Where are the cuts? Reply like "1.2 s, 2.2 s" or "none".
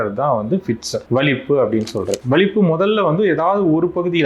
2.2 s